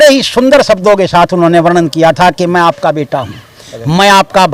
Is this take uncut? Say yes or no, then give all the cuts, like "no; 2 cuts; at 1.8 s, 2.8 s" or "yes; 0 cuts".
yes; 0 cuts